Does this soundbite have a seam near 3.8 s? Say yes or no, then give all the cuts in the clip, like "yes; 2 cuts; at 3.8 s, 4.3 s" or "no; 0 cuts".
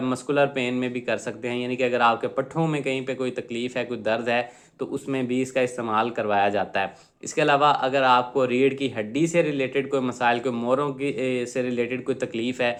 no; 0 cuts